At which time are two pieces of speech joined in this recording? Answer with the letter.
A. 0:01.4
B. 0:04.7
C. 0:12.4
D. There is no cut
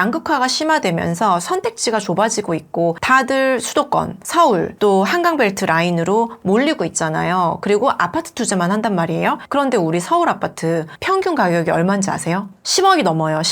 D